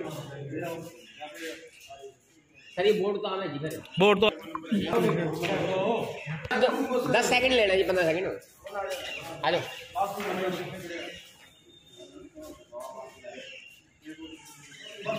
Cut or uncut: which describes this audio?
uncut